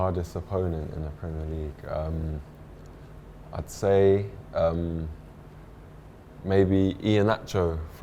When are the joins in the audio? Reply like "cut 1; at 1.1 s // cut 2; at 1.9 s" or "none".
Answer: none